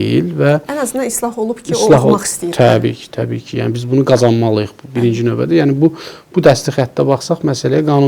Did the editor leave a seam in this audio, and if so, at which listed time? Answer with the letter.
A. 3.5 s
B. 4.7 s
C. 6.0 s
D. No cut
D